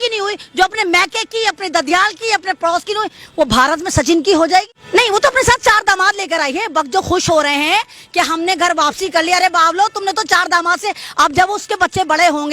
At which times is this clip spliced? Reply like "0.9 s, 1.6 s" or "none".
4.8 s